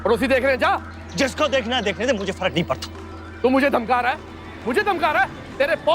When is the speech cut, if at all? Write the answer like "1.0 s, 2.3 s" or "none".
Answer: 0.9 s, 3.3 s